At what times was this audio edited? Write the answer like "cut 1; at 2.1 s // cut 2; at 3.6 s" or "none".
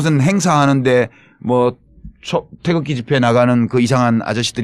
cut 1; at 1.2 s